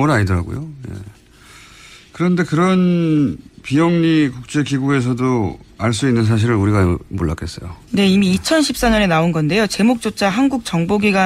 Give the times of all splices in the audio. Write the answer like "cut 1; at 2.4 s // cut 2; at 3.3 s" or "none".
cut 1; at 2.7 s